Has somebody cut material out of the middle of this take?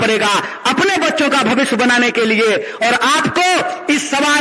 no; 0 cuts

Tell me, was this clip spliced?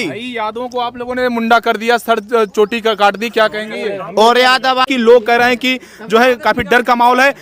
yes; 1 cut; at 4.9 s

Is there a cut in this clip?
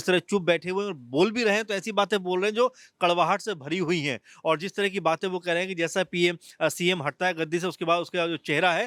no; 0 cuts

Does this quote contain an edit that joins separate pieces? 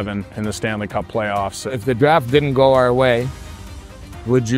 yes; 1 cut; at 1.6 s

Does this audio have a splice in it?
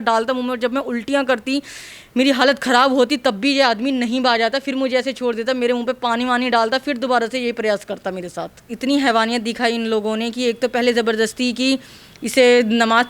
yes; 1 cut; at 8.6 s

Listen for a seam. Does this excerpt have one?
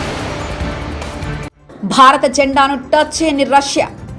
yes; 1 cut; at 1.5 s

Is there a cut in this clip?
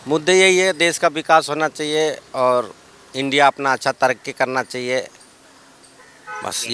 no; 0 cuts

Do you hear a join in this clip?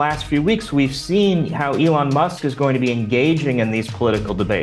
no; 0 cuts

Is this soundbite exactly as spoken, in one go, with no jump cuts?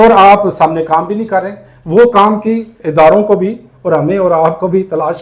yes; 0 cuts

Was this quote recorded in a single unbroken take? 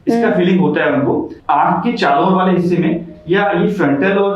no; 1 cut; at 1.3 s

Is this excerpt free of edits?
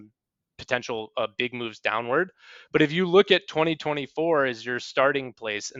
yes; 0 cuts

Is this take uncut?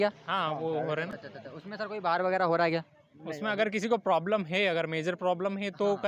yes; 0 cuts

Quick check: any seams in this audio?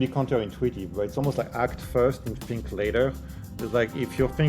no; 0 cuts

